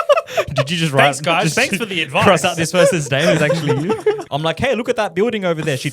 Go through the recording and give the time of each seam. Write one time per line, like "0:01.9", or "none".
0:04.2

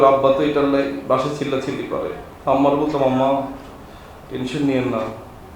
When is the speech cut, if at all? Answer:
0:02.3

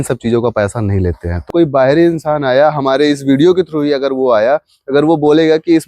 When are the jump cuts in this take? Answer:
0:01.5

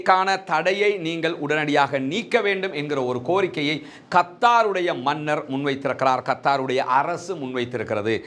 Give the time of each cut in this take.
none

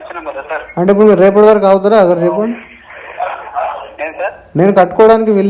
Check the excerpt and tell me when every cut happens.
0:04.4

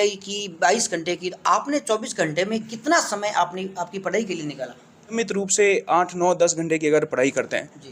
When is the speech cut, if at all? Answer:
0:05.1

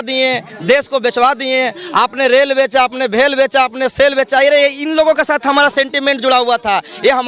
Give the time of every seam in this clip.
none

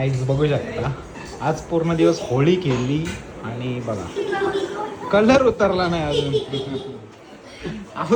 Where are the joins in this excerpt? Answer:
none

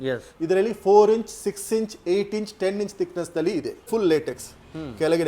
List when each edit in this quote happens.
0:03.9

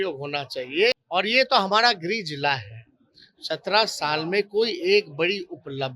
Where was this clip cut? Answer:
0:01.0

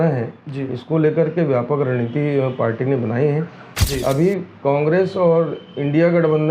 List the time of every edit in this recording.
0:03.8

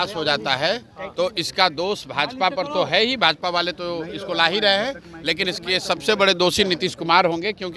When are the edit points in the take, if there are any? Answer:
none

